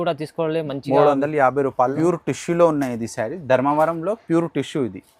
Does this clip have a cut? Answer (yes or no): yes